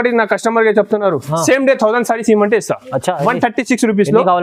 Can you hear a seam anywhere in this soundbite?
no; 0 cuts

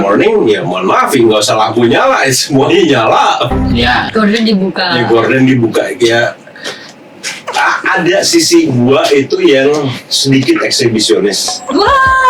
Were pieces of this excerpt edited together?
no; 0 cuts

